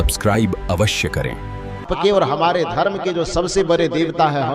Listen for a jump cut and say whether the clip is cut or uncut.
cut